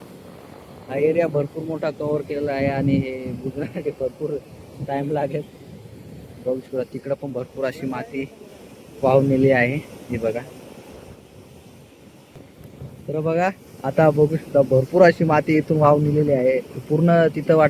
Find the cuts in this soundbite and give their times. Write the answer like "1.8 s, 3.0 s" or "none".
none